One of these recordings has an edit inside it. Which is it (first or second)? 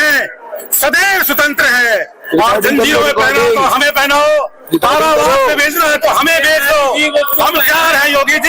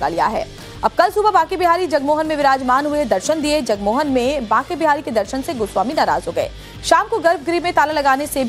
first